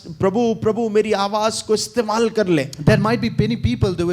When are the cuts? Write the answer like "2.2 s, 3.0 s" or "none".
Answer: none